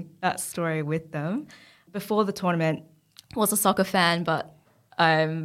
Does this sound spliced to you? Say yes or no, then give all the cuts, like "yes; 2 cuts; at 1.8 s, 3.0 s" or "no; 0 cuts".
yes; 1 cut; at 1.8 s